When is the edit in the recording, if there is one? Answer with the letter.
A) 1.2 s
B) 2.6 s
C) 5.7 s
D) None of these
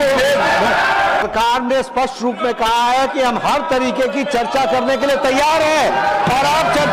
A